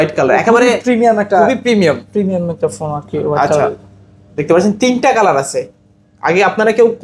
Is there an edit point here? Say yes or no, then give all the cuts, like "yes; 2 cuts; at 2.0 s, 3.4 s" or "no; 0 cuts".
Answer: no; 0 cuts